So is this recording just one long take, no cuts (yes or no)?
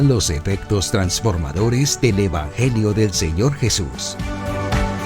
no